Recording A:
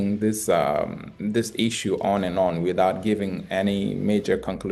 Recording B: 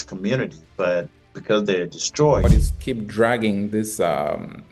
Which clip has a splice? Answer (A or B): B